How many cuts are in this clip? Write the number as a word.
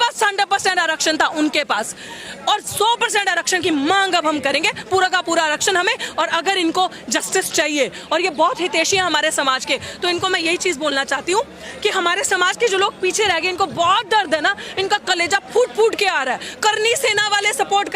zero